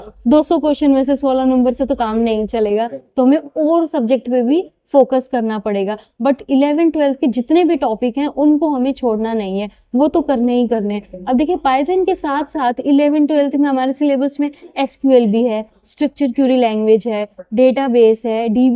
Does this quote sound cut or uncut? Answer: uncut